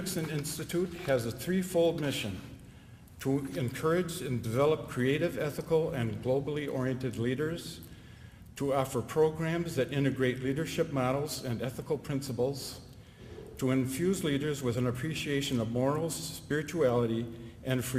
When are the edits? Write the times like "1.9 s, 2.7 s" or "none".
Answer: none